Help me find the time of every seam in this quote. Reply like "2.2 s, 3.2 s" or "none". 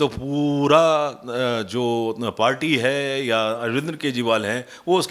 none